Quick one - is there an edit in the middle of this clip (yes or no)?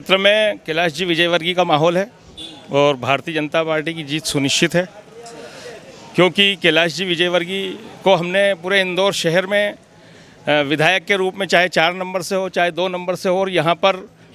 no